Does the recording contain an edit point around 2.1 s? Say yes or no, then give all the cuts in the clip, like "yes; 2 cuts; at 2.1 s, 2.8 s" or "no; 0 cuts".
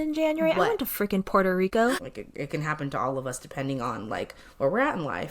yes; 1 cut; at 2.1 s